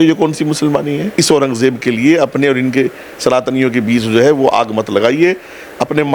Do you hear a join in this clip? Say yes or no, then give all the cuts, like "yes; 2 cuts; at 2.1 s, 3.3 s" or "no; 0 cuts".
yes; 1 cut; at 1.1 s